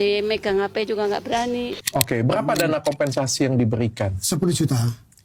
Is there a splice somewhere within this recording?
yes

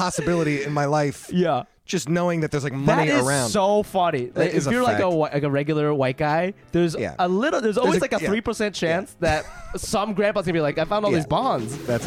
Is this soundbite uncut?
no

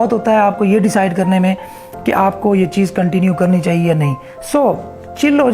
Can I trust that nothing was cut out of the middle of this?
yes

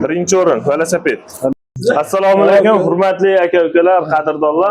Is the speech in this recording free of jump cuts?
no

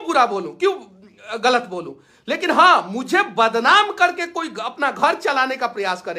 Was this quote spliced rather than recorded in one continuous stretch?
no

